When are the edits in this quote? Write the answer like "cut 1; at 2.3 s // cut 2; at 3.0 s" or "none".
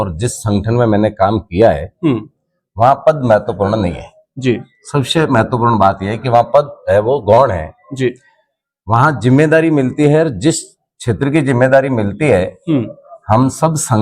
none